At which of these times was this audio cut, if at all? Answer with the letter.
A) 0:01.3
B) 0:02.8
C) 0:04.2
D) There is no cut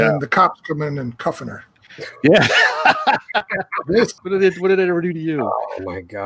C